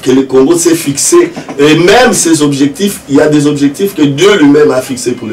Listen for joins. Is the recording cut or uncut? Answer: uncut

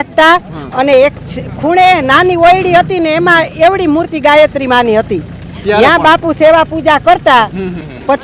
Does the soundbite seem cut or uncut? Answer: uncut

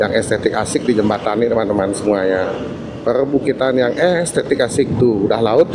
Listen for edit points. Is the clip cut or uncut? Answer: uncut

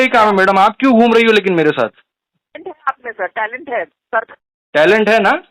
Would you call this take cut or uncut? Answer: uncut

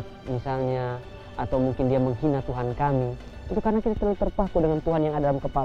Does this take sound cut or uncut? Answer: uncut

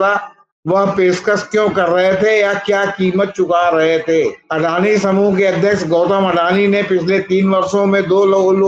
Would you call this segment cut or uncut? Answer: cut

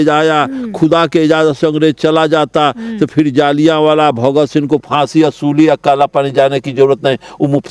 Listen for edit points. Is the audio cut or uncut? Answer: uncut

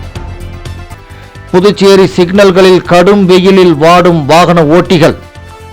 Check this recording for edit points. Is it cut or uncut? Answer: cut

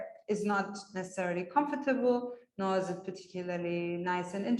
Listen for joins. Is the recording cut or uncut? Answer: uncut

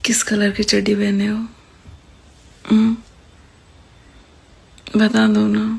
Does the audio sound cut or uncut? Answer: uncut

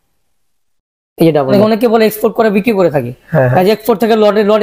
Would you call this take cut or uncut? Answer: cut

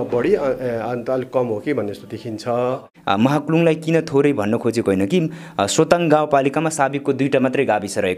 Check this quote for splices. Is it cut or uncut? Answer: cut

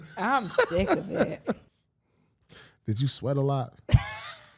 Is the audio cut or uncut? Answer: cut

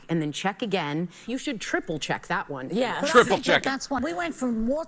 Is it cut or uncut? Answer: cut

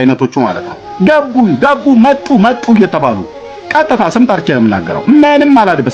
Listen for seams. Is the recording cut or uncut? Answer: uncut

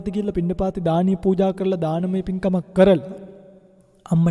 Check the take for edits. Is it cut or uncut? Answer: uncut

